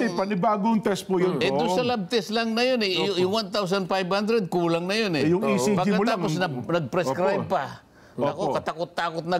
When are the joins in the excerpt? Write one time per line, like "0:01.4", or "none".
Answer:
none